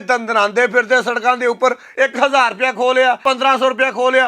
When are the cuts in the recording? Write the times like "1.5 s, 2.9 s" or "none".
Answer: 1.8 s, 3.2 s